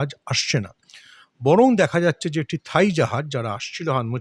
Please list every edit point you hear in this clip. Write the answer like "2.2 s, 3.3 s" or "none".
none